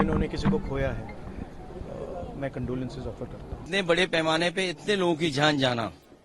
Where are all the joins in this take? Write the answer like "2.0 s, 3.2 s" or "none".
3.7 s